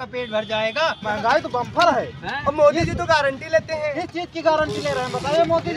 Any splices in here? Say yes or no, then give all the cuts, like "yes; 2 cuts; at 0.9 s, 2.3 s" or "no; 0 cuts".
yes; 1 cut; at 1.0 s